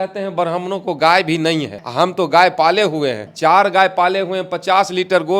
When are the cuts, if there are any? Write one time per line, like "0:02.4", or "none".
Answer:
0:01.8
0:03.2